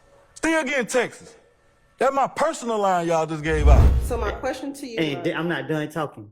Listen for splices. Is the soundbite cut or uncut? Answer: cut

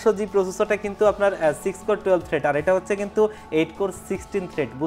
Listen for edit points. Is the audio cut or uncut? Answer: uncut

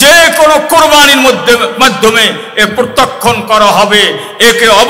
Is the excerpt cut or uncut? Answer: uncut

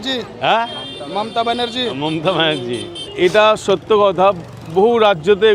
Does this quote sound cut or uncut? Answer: uncut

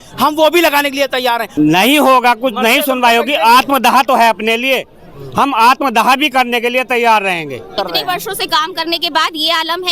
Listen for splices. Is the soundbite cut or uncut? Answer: cut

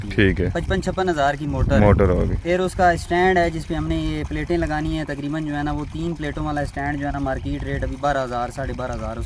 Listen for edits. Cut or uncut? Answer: uncut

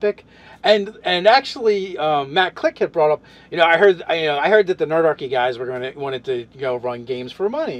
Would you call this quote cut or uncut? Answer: uncut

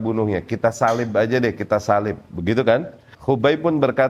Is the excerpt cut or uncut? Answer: cut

